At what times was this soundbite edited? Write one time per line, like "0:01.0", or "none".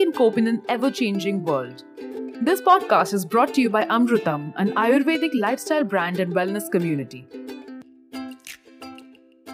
0:07.1